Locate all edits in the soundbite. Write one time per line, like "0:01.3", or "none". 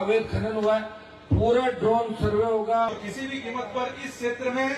0:02.9